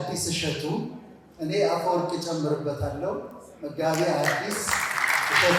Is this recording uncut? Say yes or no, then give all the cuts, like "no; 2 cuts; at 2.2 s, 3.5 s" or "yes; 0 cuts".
yes; 0 cuts